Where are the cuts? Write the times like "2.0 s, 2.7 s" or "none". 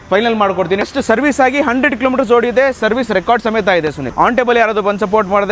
0.9 s, 4.0 s

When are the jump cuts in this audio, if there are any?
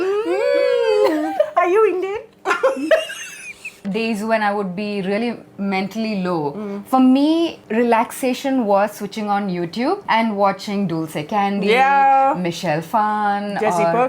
3.8 s, 7.6 s, 10.0 s

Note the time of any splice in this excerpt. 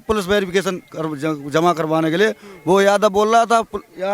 none

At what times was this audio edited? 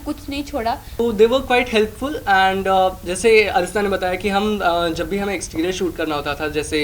1.0 s

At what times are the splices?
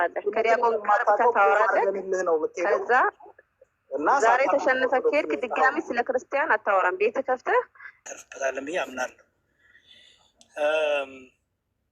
8.0 s

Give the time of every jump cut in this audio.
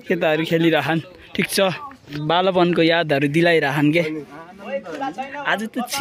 2.2 s

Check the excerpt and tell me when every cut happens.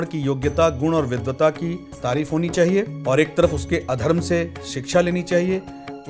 1.9 s, 2.9 s

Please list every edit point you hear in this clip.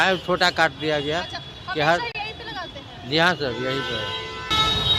none

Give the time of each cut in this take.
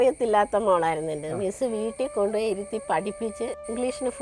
none

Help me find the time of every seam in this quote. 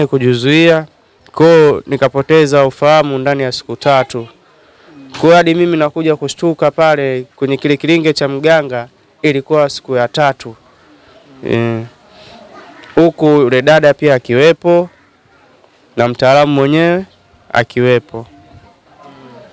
none

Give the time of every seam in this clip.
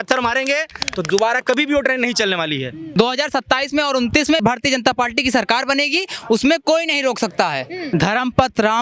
3.0 s, 4.4 s, 7.8 s

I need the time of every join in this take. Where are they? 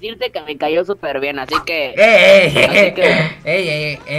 none

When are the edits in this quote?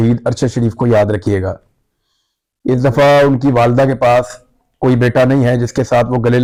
none

